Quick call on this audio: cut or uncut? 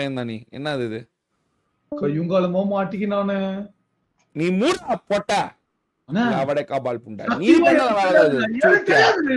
uncut